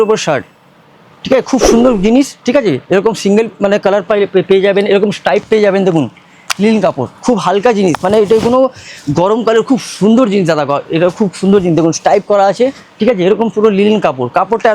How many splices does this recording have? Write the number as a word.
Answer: zero